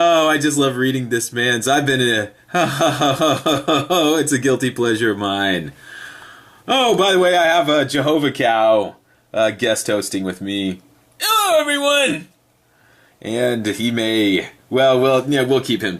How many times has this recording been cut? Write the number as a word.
one